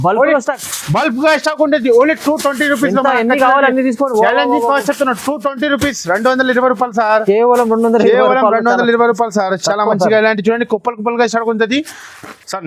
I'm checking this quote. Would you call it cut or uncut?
uncut